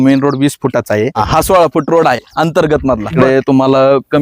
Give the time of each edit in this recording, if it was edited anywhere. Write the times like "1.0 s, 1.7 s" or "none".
1.2 s, 3.1 s